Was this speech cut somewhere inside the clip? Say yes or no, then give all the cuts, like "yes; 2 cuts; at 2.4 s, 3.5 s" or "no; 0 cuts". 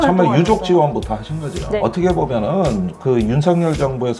yes; 1 cut; at 1.7 s